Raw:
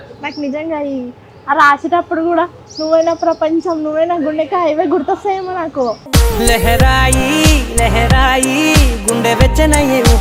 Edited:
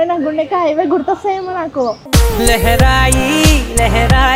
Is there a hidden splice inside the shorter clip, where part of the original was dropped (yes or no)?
no